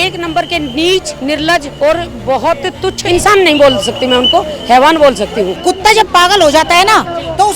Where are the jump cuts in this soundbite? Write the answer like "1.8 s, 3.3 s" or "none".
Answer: 1.4 s, 3.0 s, 5.5 s